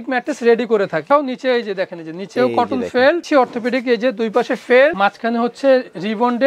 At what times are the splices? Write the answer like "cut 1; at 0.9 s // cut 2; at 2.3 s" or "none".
cut 1; at 1.1 s // cut 2; at 3.2 s // cut 3; at 5.0 s